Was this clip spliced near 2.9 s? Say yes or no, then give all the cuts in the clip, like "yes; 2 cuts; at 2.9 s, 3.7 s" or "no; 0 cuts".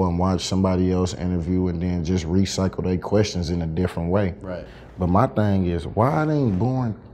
no; 1 cut; at 4.7 s